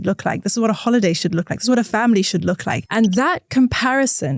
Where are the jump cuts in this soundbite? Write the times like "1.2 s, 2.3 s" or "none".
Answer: 2.8 s

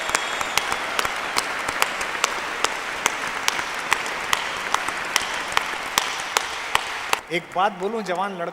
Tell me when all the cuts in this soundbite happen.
7.2 s

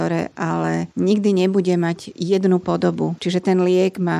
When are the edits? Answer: 3.2 s

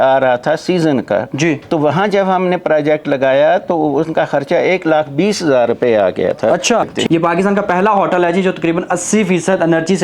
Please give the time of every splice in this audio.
6.9 s

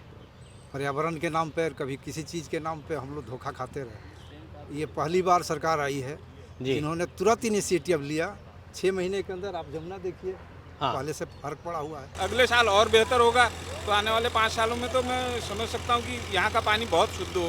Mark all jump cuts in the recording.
12.1 s

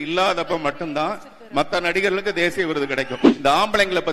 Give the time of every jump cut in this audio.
3.2 s

